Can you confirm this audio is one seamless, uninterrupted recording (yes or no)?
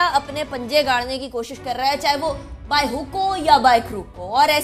yes